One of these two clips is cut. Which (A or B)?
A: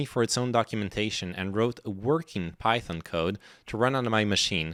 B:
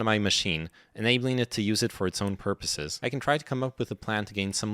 B